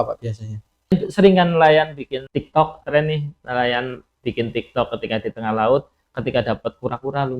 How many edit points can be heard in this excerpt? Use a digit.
2